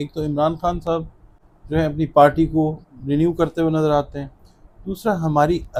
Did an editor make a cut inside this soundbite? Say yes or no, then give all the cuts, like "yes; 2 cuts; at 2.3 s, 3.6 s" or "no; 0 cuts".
no; 0 cuts